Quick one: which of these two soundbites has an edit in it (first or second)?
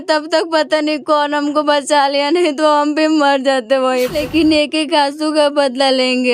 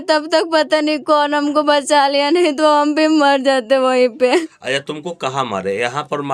first